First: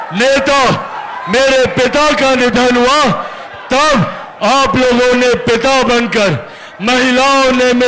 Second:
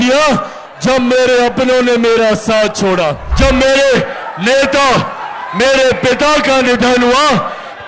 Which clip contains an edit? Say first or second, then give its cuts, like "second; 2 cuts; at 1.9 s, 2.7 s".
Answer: second; 1 cut; at 3.2 s